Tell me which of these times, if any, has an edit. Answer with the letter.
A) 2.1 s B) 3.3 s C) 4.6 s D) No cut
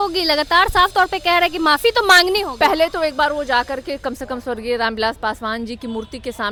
D